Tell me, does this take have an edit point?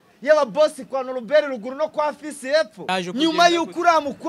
yes; 1 cut; at 2.8 s

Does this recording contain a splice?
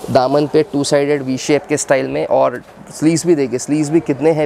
no; 0 cuts

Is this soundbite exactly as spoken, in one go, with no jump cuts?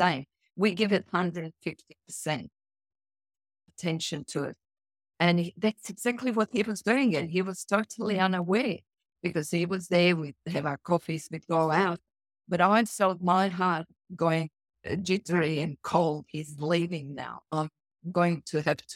yes; 0 cuts

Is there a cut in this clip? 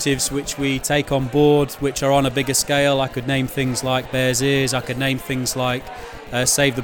no; 0 cuts

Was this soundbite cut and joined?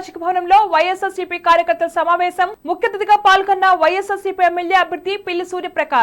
no; 0 cuts

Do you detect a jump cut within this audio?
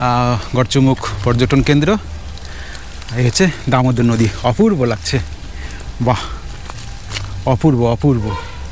no; 0 cuts

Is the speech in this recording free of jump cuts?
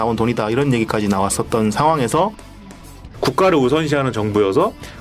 no; 1 cut; at 2.9 s

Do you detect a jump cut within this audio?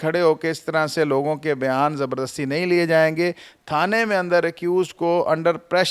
no; 0 cuts

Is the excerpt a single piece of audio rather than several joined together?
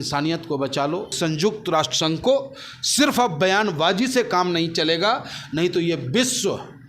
no; 1 cut; at 1.1 s

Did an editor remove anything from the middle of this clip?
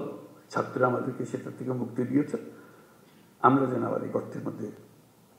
no; 0 cuts

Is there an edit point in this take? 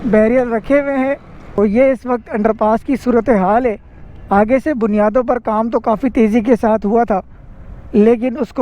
yes; 1 cut; at 1.5 s

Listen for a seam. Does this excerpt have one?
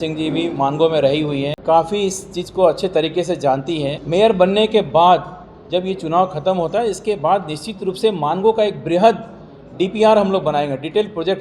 yes; 2 cuts; at 1.5 s, 4.0 s

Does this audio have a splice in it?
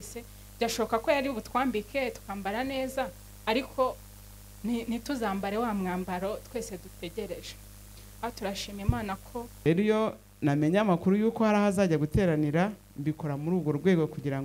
yes; 1 cut; at 9.7 s

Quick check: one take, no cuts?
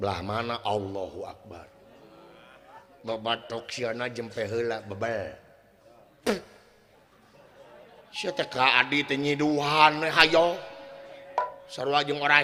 yes; 0 cuts

